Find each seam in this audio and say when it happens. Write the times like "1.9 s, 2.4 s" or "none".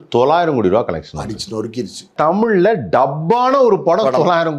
2.1 s